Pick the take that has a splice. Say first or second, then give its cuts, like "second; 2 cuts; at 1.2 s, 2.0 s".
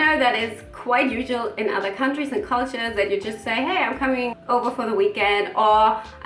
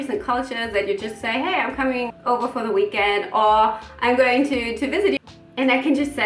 second; 1 cut; at 5.2 s